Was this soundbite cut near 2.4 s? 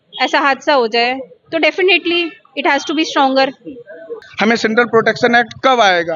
no; 1 cut; at 4.2 s

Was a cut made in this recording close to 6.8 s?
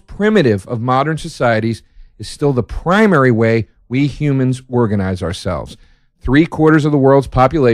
no; 1 cut; at 4.8 s

